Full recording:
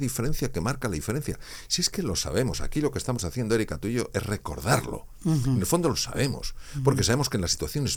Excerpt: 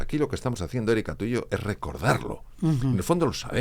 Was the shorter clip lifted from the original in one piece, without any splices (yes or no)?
yes